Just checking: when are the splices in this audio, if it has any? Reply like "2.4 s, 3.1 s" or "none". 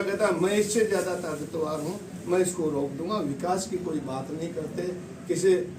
none